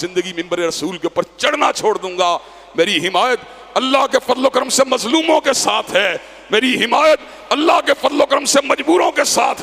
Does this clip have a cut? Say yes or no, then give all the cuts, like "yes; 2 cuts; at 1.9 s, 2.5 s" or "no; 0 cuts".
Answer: no; 0 cuts